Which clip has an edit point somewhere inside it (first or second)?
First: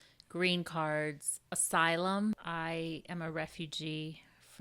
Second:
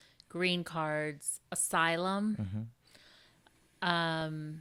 first